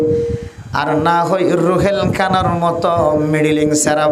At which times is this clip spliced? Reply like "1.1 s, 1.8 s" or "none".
none